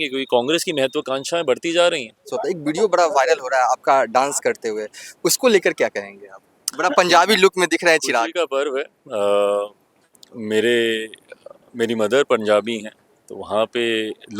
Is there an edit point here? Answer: yes; 1 cut; at 2.3 s

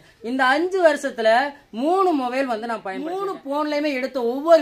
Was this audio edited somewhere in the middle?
yes; 1 cut; at 2.9 s

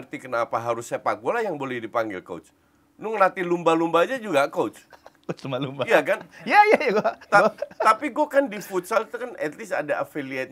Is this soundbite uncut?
yes; 0 cuts

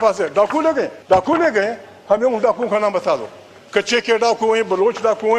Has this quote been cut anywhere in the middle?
yes; 1 cut; at 1.0 s

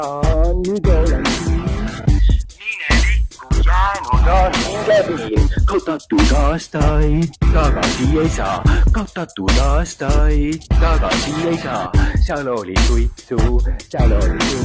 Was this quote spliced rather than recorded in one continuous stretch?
no; 0 cuts

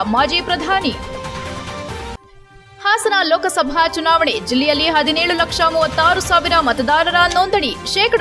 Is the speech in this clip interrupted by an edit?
no; 0 cuts

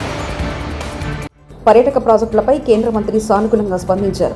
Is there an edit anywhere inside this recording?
yes; 1 cut; at 1.4 s

